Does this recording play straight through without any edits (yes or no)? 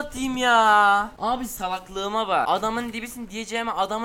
no